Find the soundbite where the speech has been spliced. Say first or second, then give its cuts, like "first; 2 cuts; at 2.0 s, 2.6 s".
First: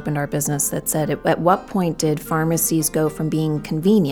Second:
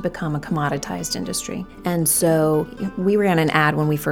second; 2 cuts; at 1.7 s, 2.8 s